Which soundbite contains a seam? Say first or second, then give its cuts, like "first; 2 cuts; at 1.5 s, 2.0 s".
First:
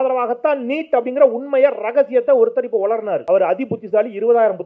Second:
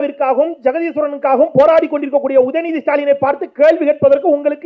first; 1 cut; at 3.2 s